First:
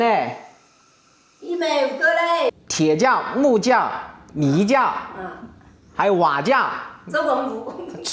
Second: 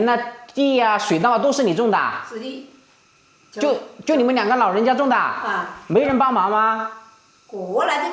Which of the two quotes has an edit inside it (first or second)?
first